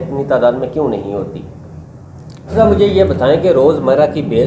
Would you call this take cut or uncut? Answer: cut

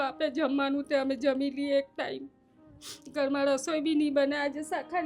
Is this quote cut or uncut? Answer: uncut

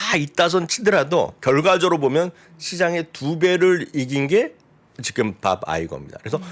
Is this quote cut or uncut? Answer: uncut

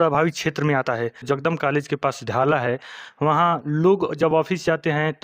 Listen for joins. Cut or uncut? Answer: cut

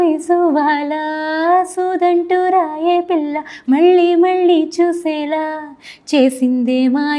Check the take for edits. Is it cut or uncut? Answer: uncut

